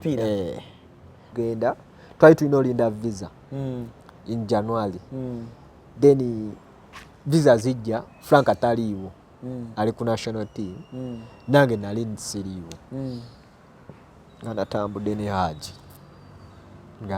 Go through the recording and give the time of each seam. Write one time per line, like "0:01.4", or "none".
0:01.3